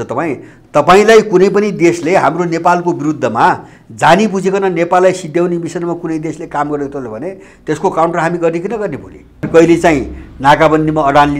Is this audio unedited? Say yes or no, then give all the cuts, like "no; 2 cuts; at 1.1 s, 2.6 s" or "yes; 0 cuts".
no; 1 cut; at 9.5 s